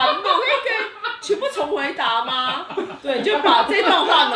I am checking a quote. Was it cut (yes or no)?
yes